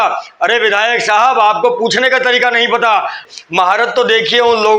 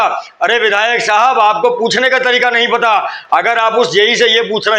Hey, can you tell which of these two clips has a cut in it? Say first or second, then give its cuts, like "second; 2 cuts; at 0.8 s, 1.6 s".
first; 1 cut; at 3.3 s